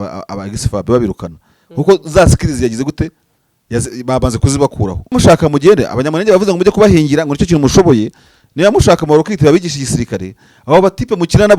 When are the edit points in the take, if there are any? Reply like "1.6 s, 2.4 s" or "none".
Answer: 5.1 s

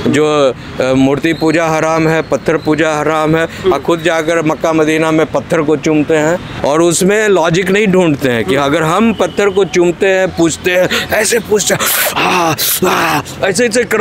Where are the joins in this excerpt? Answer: 6.6 s

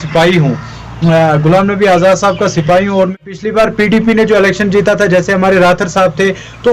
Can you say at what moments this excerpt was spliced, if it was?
3.3 s

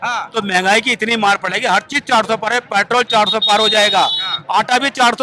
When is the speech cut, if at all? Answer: none

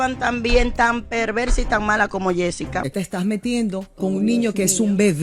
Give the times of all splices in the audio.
2.8 s

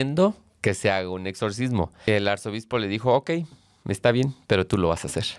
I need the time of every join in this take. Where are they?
2.1 s

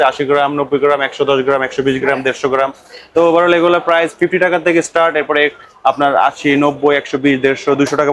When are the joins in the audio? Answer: none

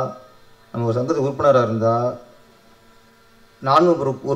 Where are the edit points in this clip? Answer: none

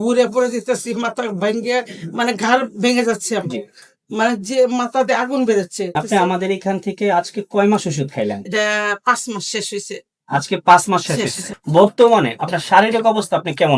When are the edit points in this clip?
5.9 s, 11.5 s

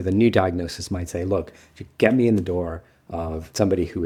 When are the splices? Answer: none

